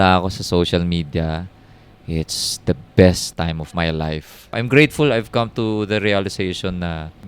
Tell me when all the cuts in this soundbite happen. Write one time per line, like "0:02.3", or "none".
0:04.3

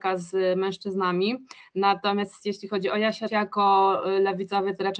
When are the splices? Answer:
0:03.3

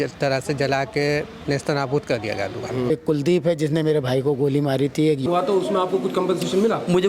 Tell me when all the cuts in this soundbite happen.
0:02.9
0:05.2

